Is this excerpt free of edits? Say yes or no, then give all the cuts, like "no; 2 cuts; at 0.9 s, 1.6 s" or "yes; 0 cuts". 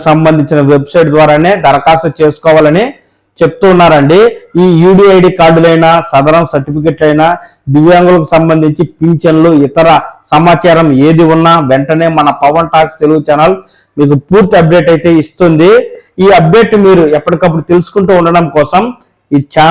yes; 0 cuts